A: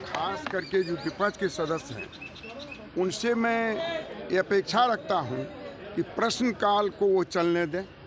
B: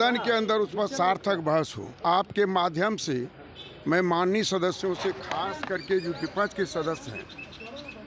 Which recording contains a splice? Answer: B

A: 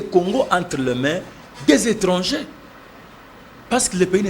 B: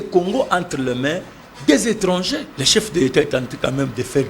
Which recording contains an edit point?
B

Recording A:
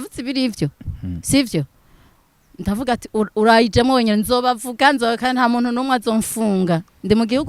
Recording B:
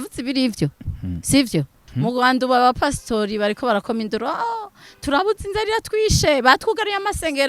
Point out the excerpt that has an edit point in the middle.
B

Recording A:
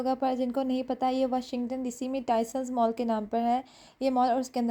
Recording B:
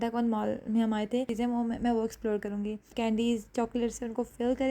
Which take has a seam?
B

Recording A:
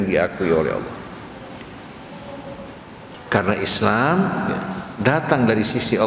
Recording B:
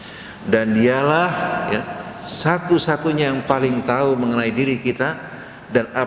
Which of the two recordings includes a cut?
A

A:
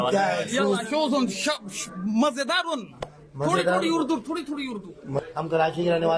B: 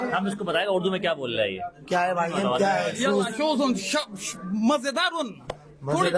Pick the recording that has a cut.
A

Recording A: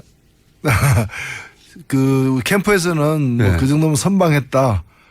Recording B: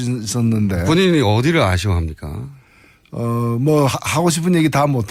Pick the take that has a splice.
A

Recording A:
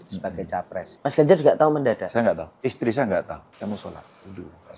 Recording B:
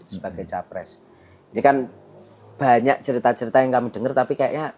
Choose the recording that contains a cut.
A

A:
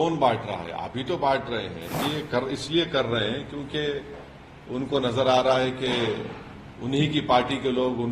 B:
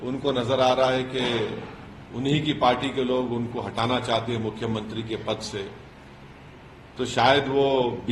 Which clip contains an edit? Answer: A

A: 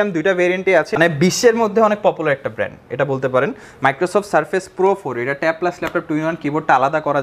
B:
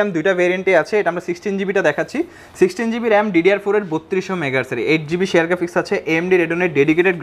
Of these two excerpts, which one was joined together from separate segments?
A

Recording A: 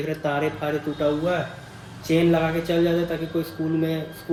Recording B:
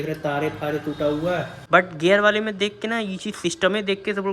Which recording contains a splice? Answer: B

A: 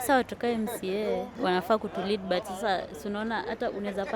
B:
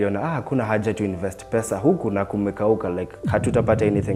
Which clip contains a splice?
A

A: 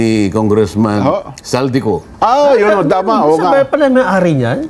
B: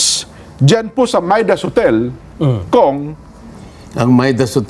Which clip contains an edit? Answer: A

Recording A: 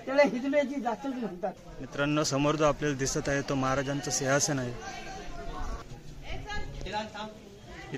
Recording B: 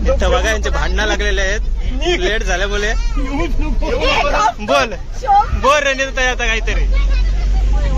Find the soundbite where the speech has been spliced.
A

